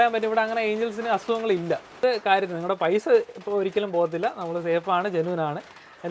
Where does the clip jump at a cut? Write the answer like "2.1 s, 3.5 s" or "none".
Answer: 1.9 s